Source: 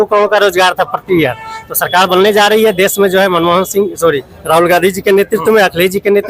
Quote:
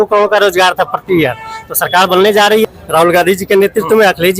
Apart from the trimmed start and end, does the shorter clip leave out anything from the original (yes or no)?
yes